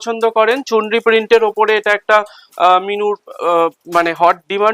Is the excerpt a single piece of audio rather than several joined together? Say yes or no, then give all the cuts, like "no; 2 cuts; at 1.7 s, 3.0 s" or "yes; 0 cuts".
yes; 0 cuts